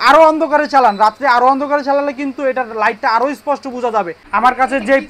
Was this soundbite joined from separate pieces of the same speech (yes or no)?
yes